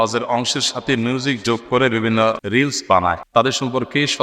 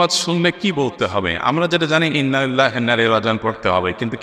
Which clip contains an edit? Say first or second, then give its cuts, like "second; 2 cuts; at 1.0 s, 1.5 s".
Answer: first; 2 cuts; at 2.4 s, 3.2 s